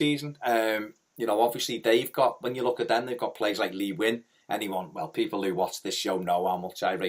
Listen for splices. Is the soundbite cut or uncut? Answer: cut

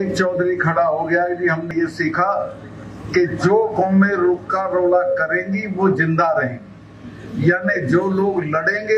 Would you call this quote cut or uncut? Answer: cut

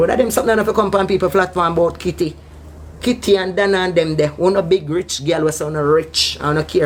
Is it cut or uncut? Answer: uncut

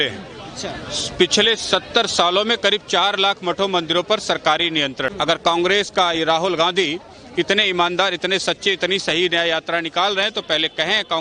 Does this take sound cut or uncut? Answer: cut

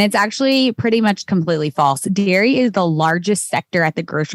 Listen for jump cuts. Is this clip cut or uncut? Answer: uncut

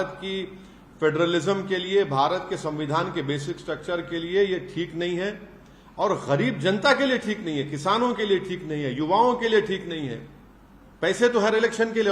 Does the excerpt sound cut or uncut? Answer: uncut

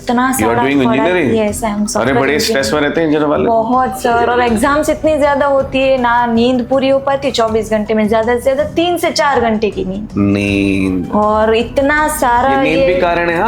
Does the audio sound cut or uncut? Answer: uncut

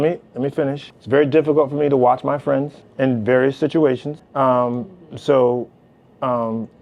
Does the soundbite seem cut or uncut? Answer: cut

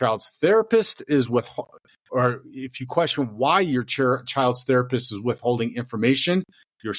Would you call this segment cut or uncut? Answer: uncut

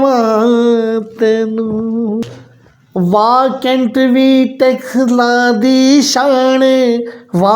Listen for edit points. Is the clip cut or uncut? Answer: cut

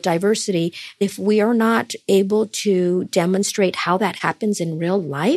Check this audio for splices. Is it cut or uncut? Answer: cut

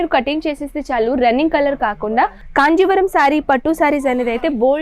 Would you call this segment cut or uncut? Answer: cut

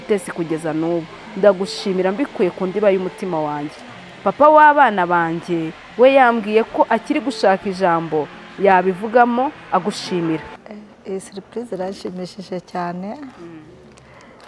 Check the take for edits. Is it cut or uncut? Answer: cut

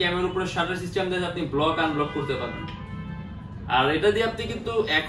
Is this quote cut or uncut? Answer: uncut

